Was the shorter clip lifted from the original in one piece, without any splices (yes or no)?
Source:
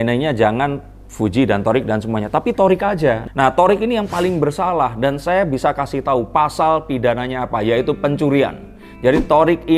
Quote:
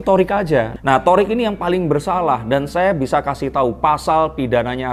yes